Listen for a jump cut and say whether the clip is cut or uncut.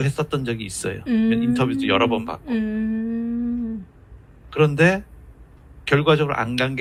uncut